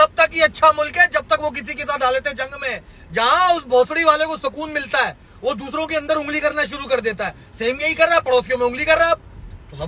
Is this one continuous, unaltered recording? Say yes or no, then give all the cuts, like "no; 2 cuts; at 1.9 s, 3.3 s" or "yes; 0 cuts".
yes; 0 cuts